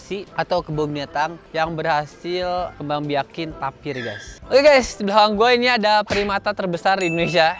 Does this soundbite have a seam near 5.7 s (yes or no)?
no